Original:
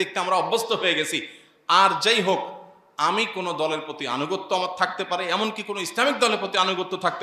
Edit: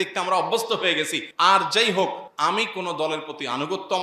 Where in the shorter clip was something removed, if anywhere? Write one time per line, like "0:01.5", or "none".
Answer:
0:01.2
0:02.3